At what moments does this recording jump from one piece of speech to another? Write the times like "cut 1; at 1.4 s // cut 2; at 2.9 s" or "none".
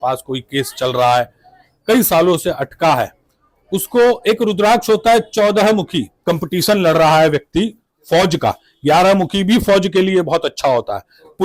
cut 1; at 6.2 s